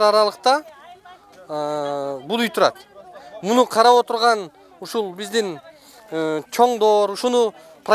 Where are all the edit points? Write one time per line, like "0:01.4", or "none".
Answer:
none

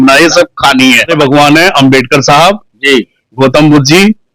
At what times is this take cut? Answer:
0:01.1

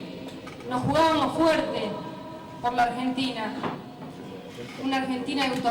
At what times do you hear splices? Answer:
none

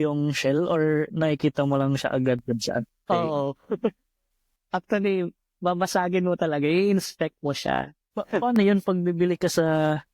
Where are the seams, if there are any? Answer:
0:08.1

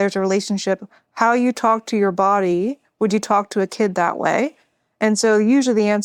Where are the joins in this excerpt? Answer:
none

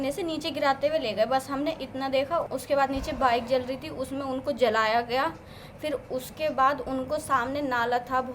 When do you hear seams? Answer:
0:02.5

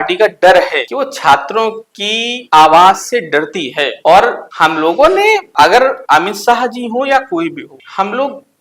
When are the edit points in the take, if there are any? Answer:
none

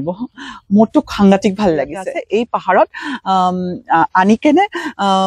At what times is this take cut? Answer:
0:02.1

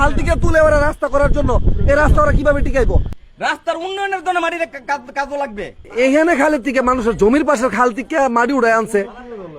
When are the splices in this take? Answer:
0:03.1
0:05.8

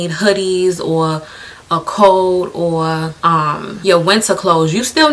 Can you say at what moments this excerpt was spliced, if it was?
none

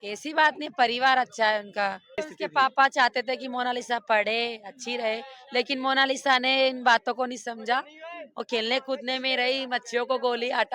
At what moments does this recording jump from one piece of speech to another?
0:02.2

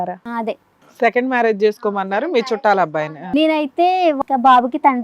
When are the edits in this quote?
0:03.2
0:04.2

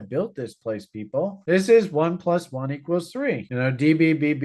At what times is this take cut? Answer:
0:01.4

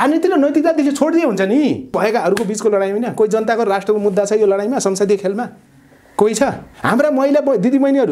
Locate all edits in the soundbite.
0:01.9
0:06.7

